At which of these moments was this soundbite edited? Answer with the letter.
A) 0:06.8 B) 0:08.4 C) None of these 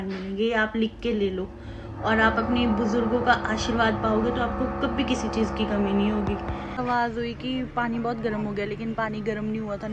A